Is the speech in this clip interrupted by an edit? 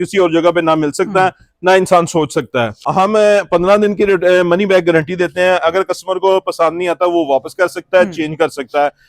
yes; 1 cut; at 2.8 s

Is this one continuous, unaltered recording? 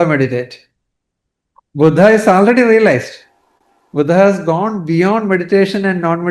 yes; 0 cuts

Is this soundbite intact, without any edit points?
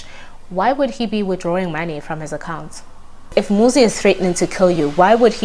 no; 1 cut; at 3.3 s

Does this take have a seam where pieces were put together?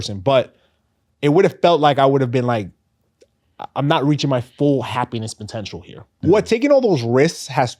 yes; 1 cut; at 6.0 s

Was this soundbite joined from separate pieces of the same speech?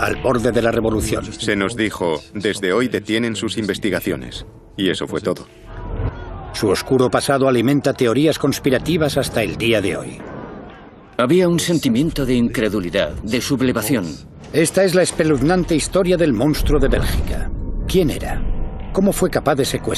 no; 0 cuts

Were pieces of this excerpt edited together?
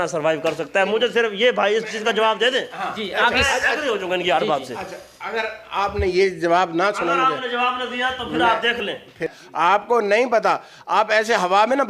yes; 1 cut; at 9.4 s

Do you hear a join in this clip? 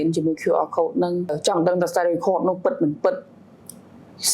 yes; 1 cut; at 1.4 s

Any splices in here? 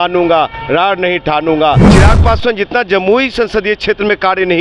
yes; 1 cut; at 1.9 s

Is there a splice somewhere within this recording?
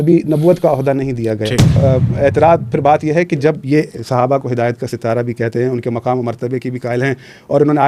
yes; 1 cut; at 1.8 s

